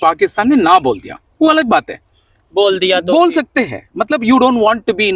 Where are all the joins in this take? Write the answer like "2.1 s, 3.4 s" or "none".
none